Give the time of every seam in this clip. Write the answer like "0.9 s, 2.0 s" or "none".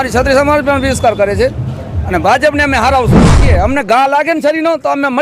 3.4 s